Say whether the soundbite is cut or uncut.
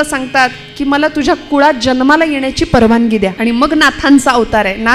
cut